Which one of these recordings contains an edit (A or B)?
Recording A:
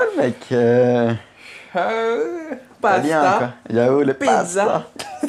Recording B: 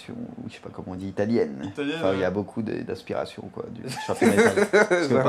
B